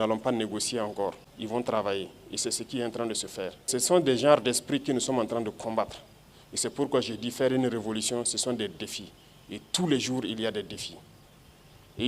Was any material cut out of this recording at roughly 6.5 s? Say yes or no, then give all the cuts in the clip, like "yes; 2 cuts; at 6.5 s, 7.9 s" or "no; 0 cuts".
no; 2 cuts; at 1.3 s, 3.7 s